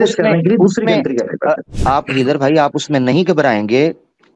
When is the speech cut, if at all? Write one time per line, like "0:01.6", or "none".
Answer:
0:01.7

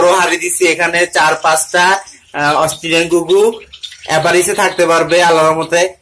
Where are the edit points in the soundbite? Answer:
none

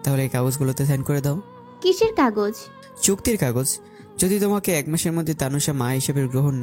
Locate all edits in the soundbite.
none

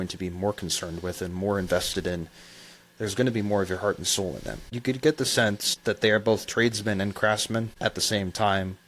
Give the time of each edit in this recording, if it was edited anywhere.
0:04.7
0:05.7
0:07.7

